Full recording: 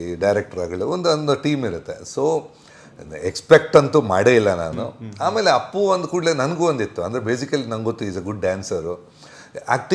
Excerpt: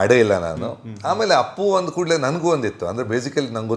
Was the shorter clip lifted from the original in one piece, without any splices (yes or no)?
yes